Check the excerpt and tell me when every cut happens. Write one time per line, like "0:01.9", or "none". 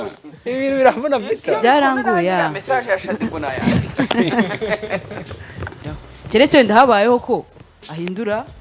0:05.8